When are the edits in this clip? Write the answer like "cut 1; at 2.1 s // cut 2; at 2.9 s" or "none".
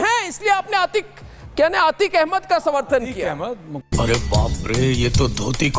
none